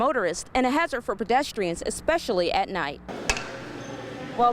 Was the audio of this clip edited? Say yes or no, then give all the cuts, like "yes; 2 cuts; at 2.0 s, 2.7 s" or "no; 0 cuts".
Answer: yes; 1 cut; at 3.1 s